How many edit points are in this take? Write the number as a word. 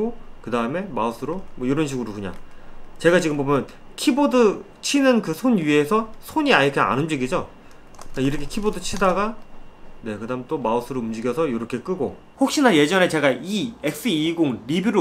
one